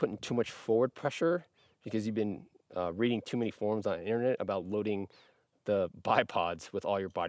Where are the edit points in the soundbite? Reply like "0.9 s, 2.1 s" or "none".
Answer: none